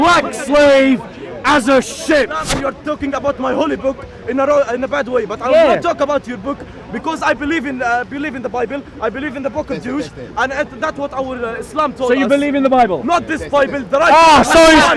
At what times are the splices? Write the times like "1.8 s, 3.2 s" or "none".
2.4 s